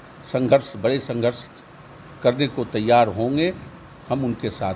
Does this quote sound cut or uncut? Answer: uncut